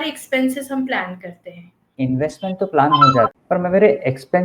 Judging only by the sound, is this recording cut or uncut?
cut